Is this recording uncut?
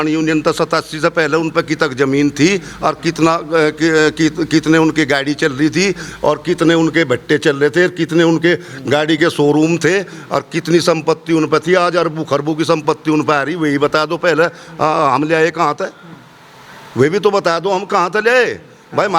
yes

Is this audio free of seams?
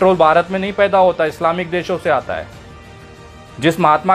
yes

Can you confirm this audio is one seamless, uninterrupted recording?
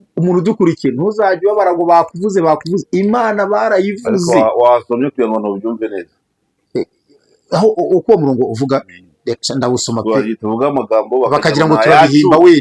yes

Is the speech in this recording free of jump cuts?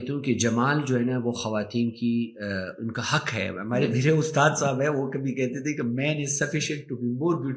yes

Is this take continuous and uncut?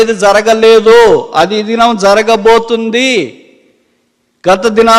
yes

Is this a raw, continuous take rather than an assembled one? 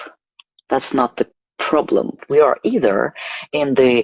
no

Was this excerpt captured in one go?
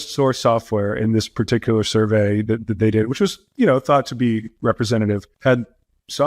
no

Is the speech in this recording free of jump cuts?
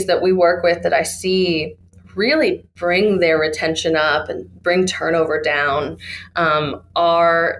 yes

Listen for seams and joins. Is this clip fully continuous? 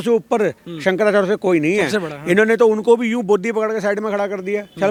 yes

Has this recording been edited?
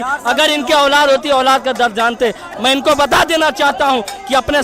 yes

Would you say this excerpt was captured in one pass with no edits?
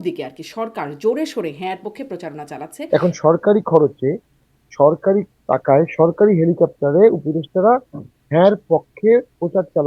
no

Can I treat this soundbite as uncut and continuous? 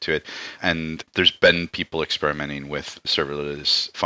no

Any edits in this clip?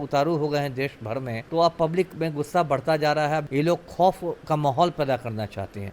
yes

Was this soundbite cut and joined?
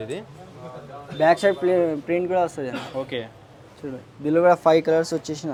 no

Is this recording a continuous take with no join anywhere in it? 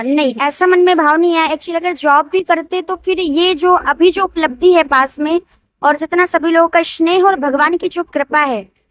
yes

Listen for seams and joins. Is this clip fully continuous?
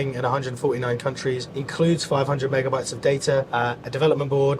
no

